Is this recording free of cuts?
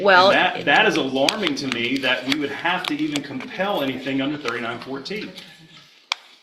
yes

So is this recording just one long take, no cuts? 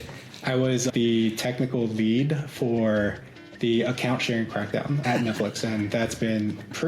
no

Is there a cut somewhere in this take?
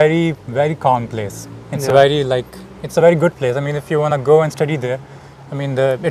no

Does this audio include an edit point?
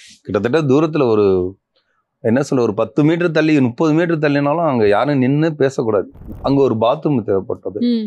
yes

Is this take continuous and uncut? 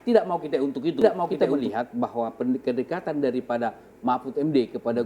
no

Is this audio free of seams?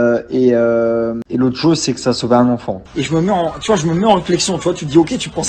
no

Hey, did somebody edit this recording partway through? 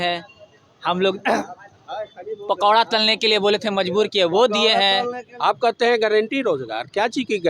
yes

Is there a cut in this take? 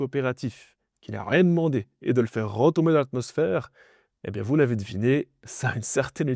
no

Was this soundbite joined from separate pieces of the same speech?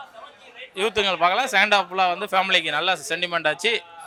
no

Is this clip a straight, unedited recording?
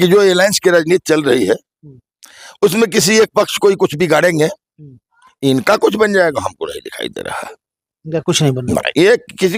yes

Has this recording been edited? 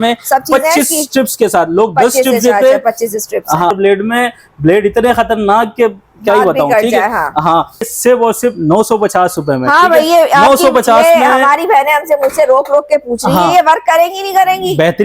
yes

